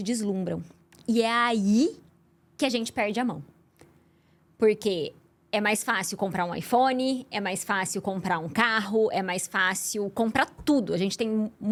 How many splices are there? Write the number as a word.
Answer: zero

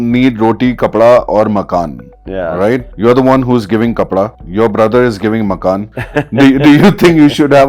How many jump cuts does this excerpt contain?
three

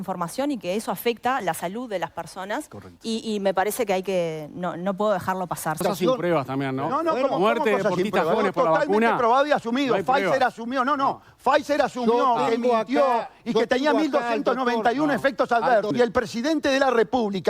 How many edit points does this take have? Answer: two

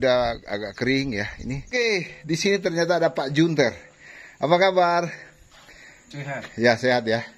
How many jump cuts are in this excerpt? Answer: one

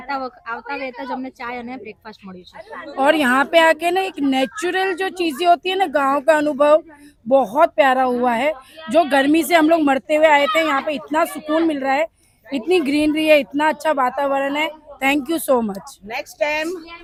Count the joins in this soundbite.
zero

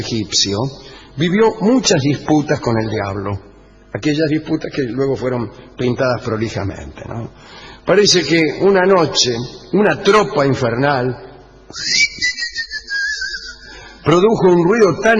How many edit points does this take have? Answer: one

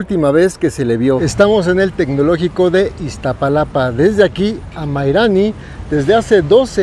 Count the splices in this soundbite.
one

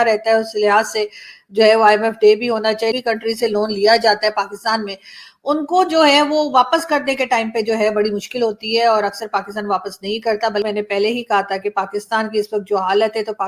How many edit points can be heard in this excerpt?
two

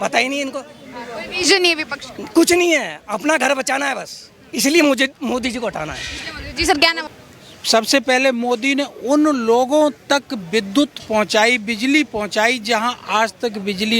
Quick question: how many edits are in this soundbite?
one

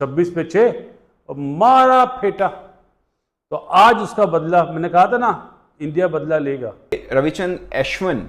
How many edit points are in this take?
one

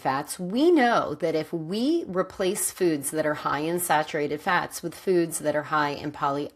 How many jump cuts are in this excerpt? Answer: zero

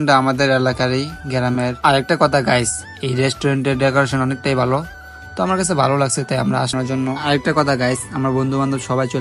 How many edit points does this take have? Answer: one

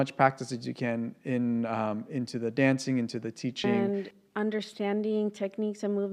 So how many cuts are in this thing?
one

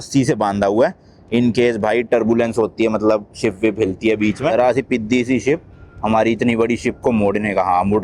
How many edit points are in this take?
one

